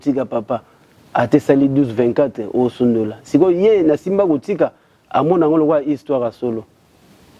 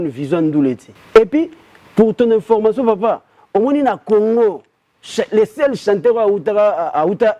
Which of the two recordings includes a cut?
second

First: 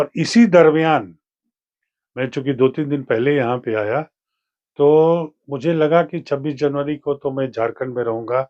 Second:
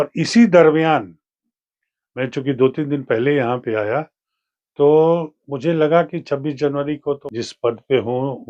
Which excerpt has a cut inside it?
second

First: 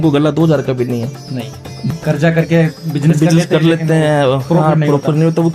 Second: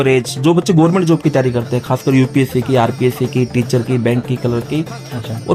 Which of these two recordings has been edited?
first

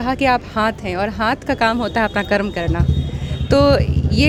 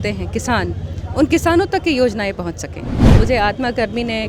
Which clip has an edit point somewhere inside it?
second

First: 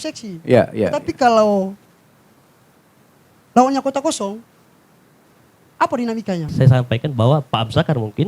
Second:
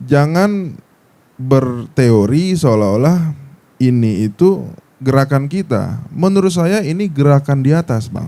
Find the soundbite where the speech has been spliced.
first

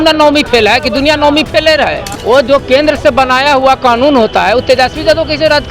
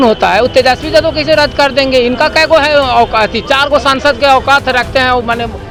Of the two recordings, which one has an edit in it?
first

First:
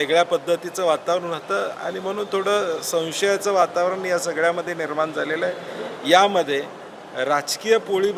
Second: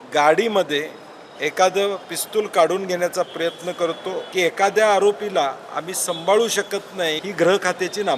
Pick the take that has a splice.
second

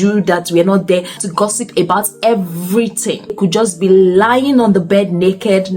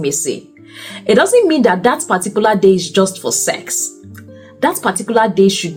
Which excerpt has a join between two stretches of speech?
first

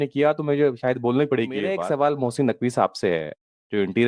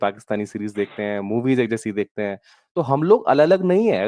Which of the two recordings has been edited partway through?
first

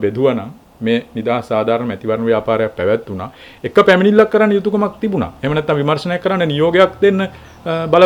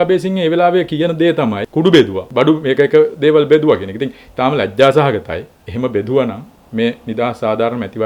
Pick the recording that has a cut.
second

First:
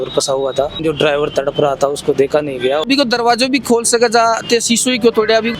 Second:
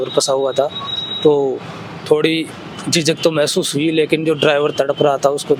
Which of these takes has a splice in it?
first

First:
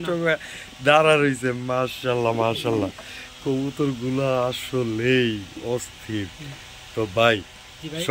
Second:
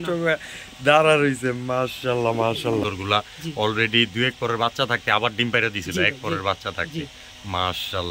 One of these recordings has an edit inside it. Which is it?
second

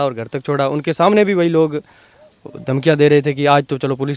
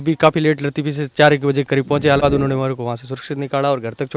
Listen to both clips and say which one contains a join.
second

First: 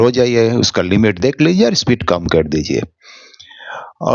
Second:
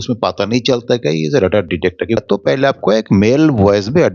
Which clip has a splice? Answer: second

